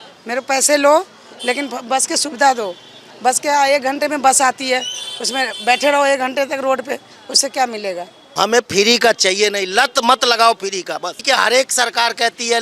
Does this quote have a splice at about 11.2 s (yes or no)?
yes